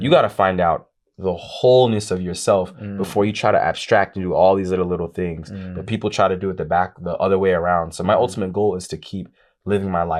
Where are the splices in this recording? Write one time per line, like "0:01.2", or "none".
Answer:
none